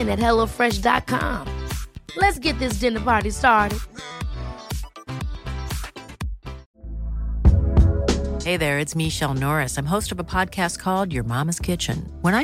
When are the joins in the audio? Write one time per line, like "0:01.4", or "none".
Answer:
0:06.6